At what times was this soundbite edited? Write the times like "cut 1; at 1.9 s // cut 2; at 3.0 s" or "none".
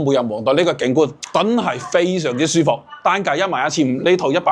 cut 1; at 1.2 s